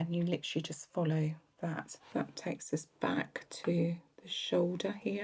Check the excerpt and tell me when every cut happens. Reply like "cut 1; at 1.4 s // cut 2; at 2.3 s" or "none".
cut 1; at 1.9 s

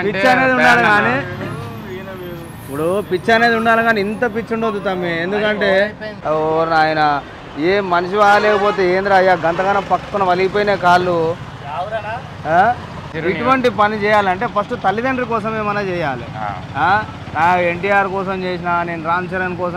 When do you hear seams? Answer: cut 1; at 6.1 s // cut 2; at 13.0 s

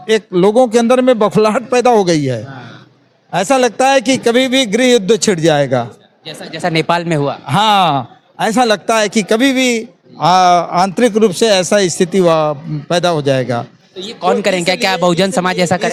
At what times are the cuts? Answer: none

